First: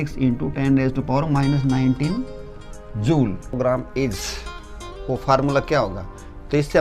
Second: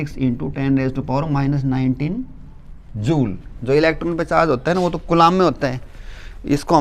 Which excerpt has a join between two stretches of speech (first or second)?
first